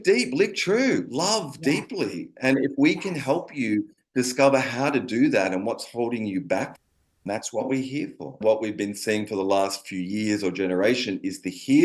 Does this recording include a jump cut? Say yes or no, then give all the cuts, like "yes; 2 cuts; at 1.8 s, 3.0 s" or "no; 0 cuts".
yes; 1 cut; at 8.4 s